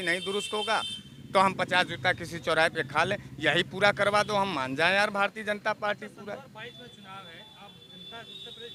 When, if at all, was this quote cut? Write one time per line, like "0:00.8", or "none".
none